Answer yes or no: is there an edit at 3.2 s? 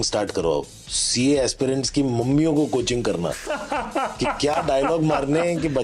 no